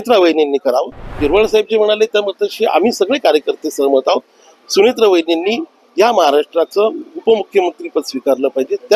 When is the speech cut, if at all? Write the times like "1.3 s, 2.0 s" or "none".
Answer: 1.1 s